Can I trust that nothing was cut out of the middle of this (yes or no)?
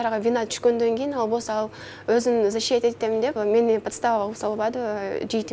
no